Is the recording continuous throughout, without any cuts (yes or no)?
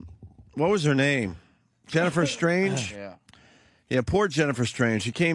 yes